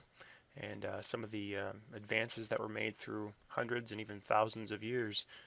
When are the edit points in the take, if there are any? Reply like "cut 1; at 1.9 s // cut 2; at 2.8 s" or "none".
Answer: cut 1; at 3.4 s